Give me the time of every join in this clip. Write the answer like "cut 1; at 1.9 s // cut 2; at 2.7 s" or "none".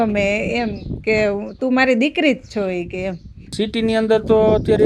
cut 1; at 3.5 s

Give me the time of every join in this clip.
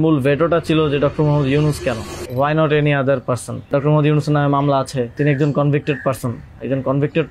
cut 1; at 2.2 s // cut 2; at 3.7 s // cut 3; at 5.1 s

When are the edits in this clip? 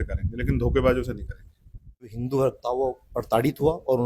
cut 1; at 2.2 s

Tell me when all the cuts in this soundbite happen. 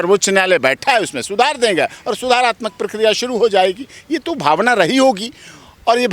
none

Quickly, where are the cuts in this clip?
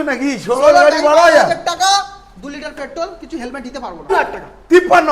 cut 1; at 4.1 s

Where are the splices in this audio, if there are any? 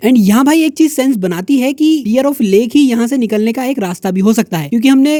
none

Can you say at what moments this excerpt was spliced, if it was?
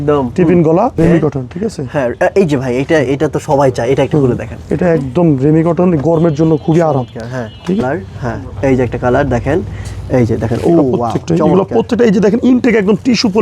cut 1; at 1.0 s // cut 2; at 7.8 s

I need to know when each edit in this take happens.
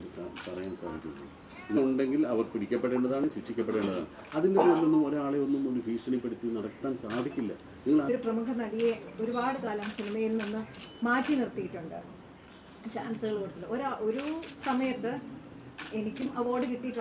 cut 1; at 1.8 s // cut 2; at 8.1 s

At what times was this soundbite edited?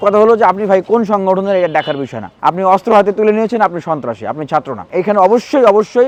none

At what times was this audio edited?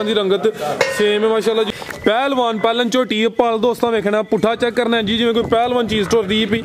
cut 1; at 1.7 s

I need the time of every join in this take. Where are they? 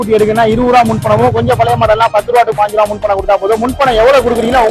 none

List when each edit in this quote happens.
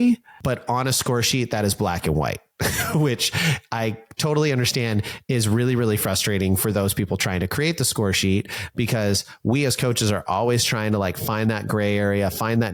none

